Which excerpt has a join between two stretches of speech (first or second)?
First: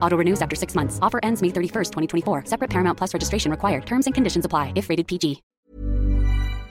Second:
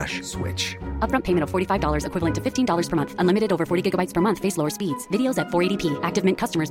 first